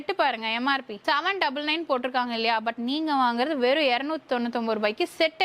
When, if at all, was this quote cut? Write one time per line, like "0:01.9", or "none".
none